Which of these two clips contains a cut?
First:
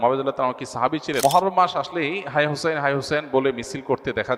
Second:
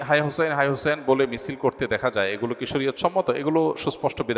first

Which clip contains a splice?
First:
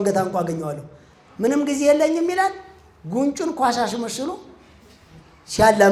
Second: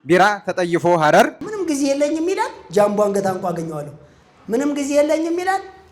second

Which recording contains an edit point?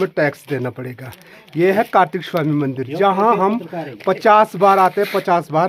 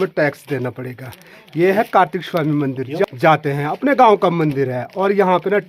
second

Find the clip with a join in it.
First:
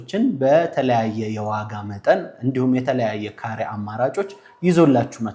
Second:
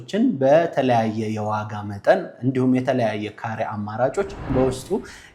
second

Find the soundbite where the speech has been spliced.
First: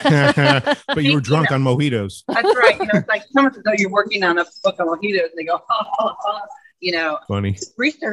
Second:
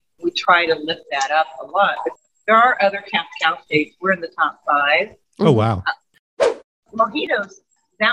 second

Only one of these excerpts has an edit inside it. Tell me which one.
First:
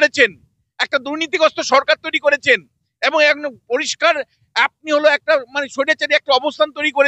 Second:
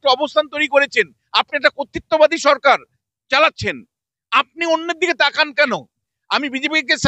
second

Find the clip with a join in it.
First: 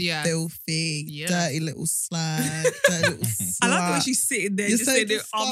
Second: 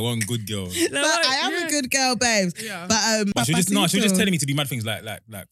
second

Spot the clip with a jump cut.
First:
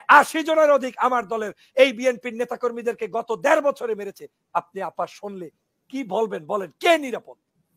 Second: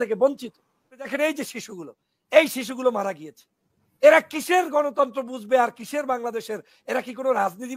second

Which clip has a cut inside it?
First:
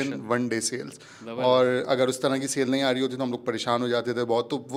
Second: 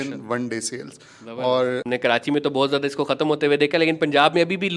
second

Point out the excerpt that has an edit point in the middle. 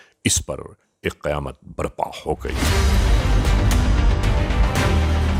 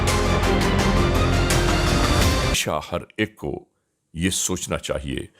second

